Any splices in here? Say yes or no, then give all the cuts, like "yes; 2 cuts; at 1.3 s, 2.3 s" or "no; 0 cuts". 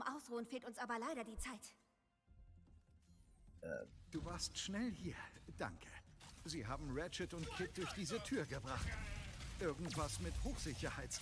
no; 0 cuts